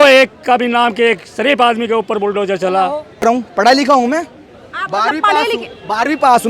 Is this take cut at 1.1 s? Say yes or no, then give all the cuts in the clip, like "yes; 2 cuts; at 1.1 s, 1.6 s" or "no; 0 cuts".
no; 1 cut; at 3.2 s